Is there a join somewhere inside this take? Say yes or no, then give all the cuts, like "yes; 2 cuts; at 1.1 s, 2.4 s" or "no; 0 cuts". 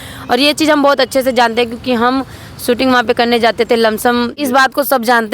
yes; 1 cut; at 4.4 s